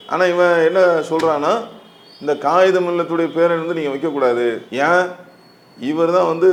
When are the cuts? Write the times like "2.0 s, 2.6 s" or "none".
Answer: none